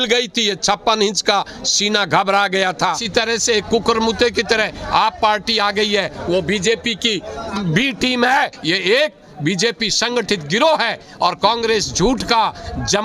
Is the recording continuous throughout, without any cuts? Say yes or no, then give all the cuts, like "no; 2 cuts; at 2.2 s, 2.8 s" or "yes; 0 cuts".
no; 2 cuts; at 2.8 s, 8.6 s